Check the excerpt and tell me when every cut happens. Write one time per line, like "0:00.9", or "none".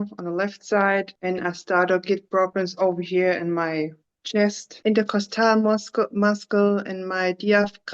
0:01.1
0:04.7